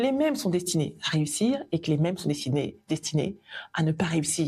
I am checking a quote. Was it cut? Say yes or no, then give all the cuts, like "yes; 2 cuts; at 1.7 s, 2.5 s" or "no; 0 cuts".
no; 0 cuts